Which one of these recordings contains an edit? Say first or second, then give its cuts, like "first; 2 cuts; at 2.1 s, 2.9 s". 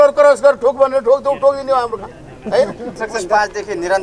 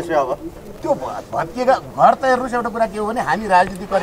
first; 1 cut; at 3.0 s